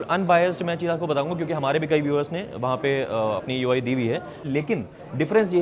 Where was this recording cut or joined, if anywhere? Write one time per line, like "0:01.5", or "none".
0:04.4